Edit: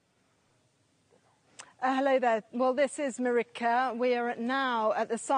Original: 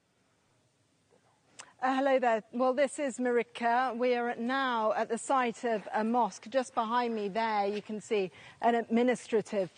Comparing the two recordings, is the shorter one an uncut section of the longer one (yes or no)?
yes